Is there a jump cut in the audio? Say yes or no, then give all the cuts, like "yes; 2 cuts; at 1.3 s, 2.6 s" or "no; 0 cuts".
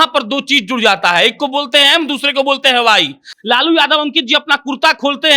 yes; 1 cut; at 3.3 s